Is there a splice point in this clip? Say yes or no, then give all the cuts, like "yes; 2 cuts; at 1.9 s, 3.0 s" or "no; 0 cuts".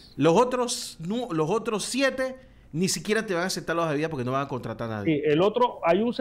no; 0 cuts